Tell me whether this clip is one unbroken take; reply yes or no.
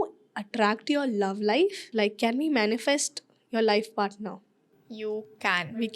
no